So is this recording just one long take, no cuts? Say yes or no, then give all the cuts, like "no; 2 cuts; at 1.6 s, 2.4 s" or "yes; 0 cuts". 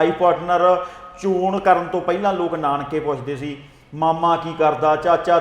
yes; 0 cuts